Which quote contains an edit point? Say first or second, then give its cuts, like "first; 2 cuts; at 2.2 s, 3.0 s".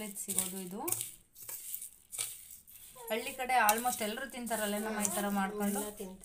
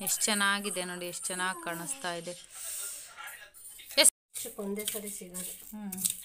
second; 1 cut; at 4.4 s